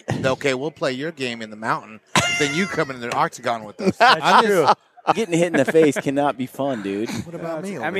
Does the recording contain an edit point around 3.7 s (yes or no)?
no